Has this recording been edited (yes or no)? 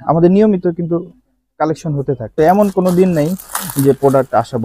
no